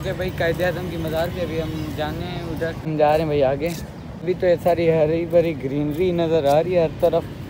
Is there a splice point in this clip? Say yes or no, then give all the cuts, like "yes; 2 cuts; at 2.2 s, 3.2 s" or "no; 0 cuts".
no; 0 cuts